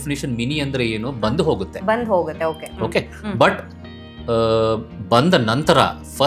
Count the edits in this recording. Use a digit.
0